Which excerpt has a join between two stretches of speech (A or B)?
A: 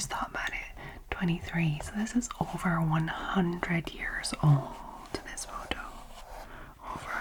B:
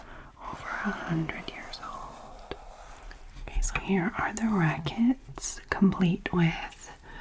B